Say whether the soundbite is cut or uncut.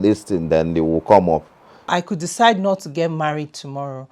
cut